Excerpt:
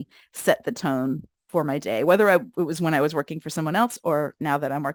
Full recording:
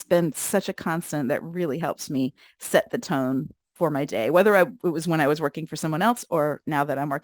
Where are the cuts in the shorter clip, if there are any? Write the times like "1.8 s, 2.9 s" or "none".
none